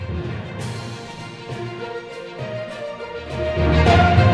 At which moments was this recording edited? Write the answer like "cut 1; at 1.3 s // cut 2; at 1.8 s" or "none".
cut 1; at 1.4 s